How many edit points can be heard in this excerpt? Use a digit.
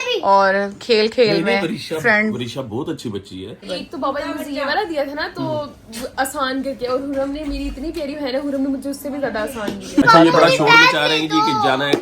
2